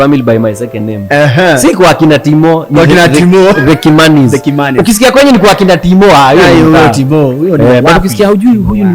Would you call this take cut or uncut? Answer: uncut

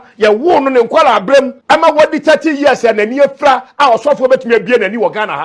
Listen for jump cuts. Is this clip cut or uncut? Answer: uncut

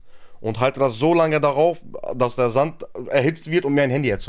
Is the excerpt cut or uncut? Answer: uncut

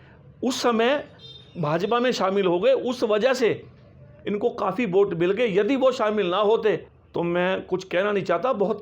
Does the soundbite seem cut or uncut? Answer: cut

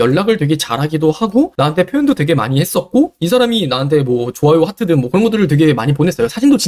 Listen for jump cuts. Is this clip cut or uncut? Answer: uncut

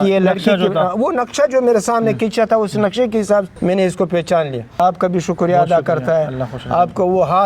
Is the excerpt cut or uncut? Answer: cut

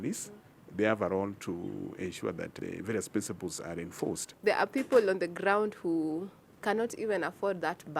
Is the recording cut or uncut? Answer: cut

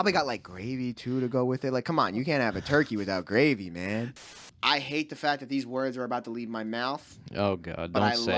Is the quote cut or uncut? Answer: cut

